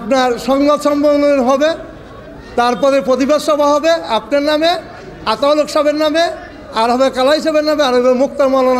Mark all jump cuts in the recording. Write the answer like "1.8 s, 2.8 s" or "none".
none

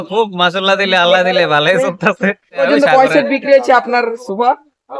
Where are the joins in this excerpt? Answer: 2.6 s

